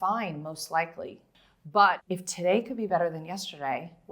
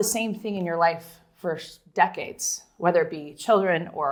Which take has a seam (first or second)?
first